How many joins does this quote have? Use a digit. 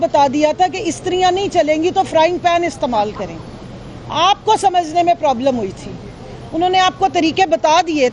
0